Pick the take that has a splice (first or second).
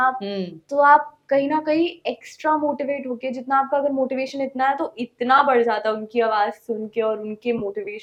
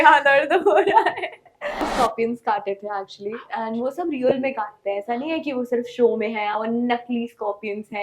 second